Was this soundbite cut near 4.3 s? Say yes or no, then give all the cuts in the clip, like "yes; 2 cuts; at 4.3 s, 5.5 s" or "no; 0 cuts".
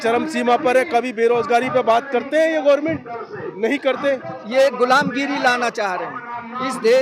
yes; 1 cut; at 4.3 s